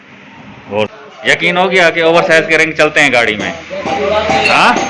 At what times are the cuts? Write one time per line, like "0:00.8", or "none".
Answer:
0:00.9